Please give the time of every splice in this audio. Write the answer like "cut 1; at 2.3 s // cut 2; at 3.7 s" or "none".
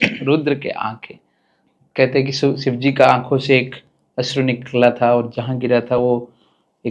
none